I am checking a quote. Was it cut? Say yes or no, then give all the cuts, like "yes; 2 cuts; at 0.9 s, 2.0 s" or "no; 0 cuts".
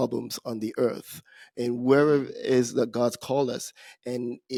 no; 0 cuts